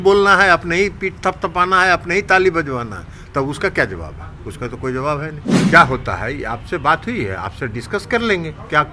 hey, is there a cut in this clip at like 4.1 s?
no; 1 cut; at 5.4 s

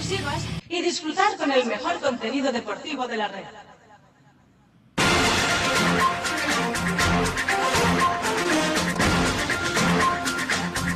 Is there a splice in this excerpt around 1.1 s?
no; 1 cut; at 7.3 s

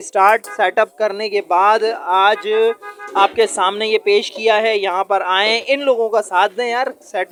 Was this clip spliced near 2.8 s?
no; 0 cuts

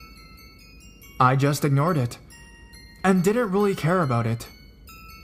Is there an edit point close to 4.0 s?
yes; 1 cut; at 4.0 s

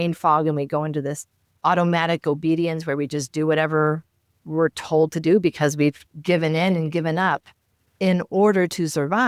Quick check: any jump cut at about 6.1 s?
yes; 1 cut; at 6.1 s

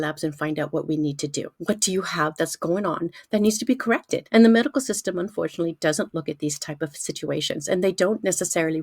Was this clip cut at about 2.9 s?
no; 2 cuts; at 1.3 s, 4.2 s

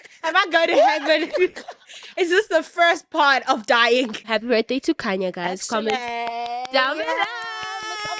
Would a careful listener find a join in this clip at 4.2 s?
yes; 1 cut; at 4.2 s

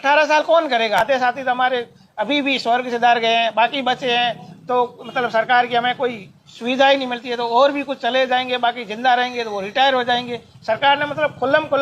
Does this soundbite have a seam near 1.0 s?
yes; 1 cut; at 1.0 s

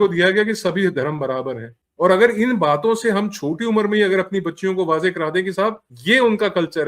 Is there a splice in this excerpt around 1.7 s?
no; 0 cuts

